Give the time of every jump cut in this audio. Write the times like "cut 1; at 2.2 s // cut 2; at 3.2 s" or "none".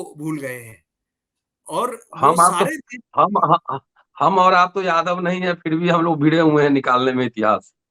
none